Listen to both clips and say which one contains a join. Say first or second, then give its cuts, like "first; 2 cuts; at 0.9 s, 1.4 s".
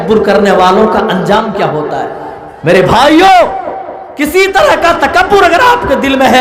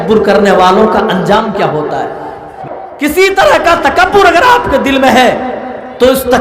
second; 1 cut; at 2.5 s